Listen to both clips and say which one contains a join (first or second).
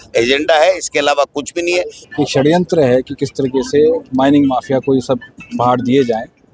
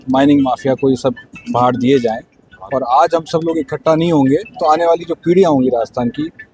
first